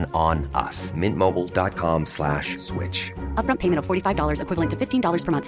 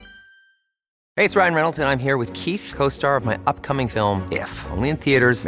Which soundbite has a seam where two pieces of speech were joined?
second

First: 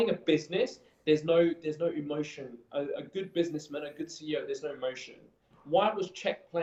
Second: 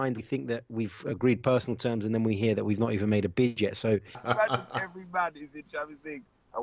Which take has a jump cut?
second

